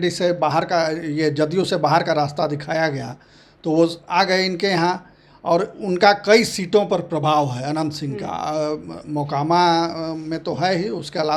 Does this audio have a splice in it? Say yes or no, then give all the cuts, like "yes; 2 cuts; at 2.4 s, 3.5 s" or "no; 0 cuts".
no; 0 cuts